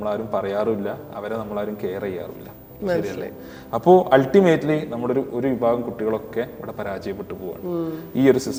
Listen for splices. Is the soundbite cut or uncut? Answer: uncut